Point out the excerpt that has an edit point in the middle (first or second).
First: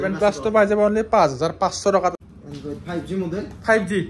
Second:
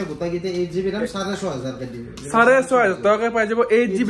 first